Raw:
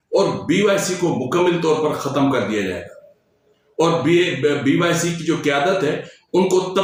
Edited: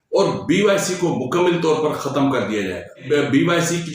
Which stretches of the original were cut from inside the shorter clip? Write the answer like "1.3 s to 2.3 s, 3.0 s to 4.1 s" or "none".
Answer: 3.0 s to 4.3 s

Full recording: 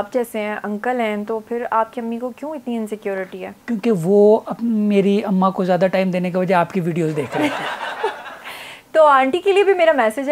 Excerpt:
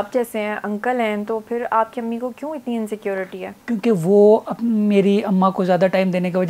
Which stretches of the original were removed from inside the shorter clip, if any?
none

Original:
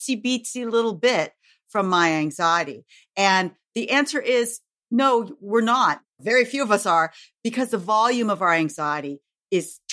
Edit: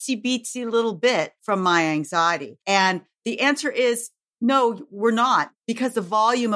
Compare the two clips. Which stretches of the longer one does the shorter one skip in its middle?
1.4 s to 1.6 s, 2.8 s to 3.0 s, 6.1 s to 7.3 s

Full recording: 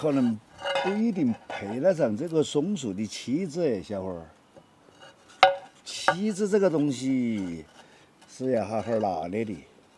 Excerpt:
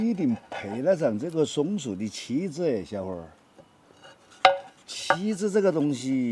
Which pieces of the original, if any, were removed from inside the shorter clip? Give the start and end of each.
none

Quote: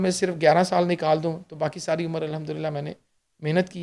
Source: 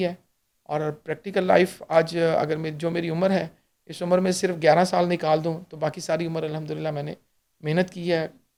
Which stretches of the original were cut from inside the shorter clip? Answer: none

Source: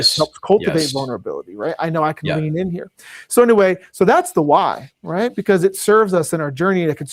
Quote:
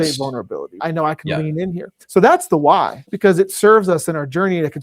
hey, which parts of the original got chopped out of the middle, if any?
1.5 s to 1.8 s, 3.0 s to 3.9 s, 5.0 s to 5.4 s

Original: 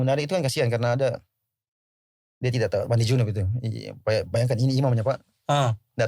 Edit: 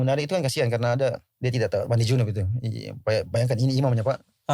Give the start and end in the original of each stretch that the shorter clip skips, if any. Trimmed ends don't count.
1.3 s to 2.3 s

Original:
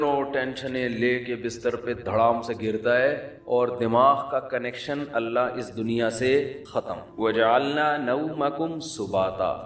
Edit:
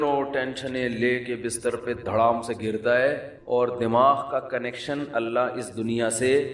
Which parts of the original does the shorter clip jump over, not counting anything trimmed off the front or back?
none

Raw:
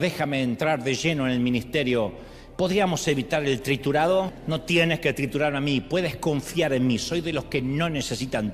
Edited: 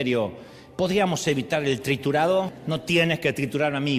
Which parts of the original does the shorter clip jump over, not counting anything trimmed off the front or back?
none

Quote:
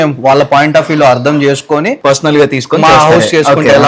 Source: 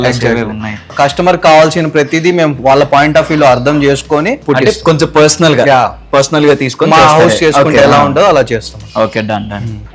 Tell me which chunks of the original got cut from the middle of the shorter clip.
4.3 s to 6.0 s

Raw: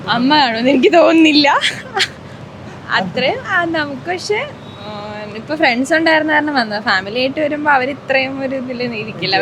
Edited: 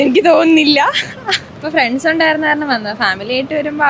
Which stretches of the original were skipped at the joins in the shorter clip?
2.2 s to 5.4 s

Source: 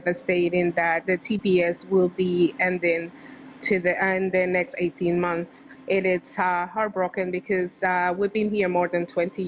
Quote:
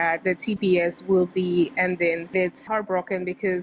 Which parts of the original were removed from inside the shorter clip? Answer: 3.5 s to 6.7 s

